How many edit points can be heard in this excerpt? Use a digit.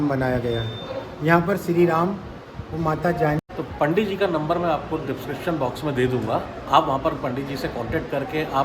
1